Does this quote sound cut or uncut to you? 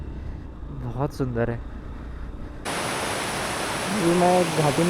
cut